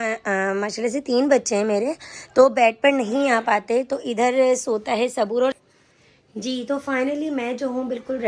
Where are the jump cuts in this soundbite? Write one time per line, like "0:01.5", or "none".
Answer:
0:05.6